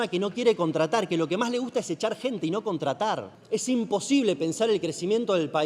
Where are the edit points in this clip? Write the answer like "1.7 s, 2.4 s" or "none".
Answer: 3.3 s

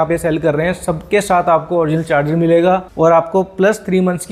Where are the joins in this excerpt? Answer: none

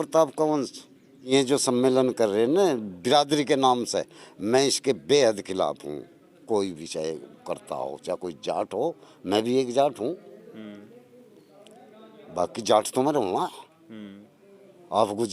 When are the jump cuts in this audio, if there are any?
1.3 s

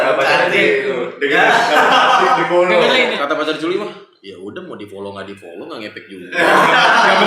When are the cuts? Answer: 3.1 s

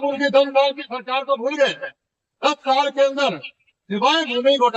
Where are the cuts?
none

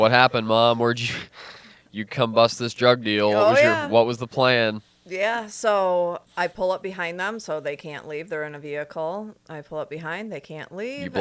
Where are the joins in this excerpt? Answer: 6.2 s

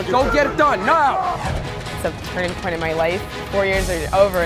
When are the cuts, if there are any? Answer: 1.4 s, 3.3 s

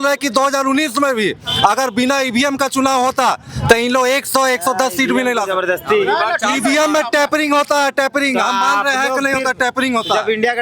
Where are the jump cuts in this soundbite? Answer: none

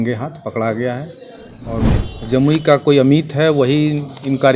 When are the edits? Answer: 1.9 s

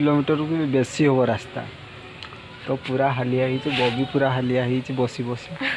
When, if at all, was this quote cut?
none

